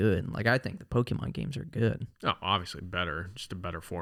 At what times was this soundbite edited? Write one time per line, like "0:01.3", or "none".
none